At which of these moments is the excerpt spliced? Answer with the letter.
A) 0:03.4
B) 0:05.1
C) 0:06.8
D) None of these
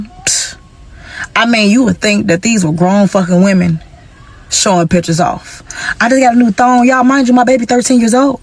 D